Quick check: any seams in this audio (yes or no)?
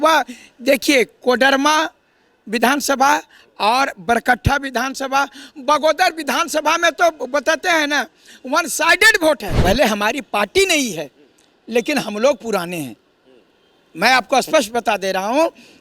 yes